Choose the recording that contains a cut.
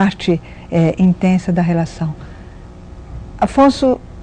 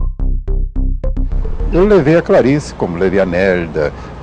second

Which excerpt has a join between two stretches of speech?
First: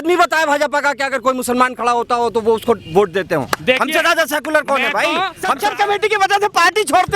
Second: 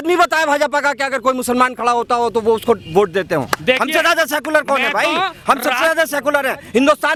first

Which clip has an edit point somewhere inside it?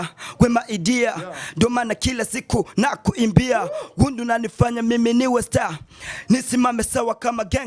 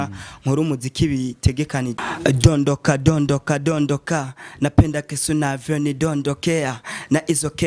second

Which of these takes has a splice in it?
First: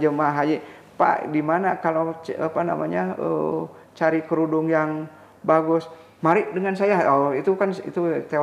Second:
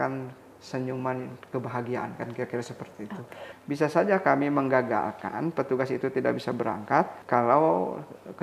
second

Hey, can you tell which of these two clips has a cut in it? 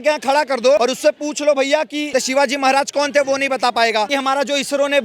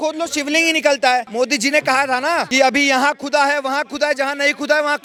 first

